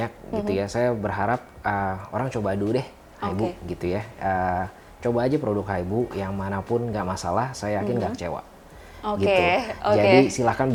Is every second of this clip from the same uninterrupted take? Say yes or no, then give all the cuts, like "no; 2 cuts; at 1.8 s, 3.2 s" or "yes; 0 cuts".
yes; 0 cuts